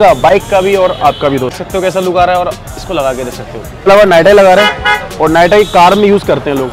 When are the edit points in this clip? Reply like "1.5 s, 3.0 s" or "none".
1.6 s, 3.9 s